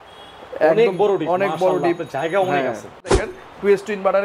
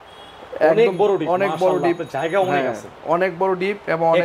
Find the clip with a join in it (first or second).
first